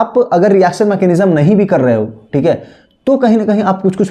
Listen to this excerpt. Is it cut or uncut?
uncut